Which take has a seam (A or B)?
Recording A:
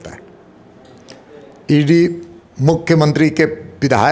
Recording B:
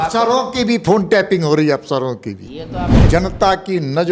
B